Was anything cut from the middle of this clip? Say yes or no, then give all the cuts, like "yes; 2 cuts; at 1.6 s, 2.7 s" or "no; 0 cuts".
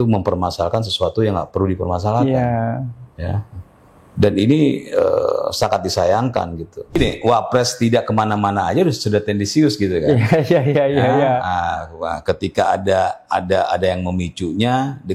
yes; 1 cut; at 7.0 s